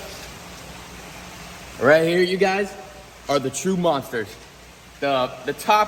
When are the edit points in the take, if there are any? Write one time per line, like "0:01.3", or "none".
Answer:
none